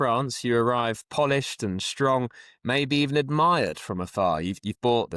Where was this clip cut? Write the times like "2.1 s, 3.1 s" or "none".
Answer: none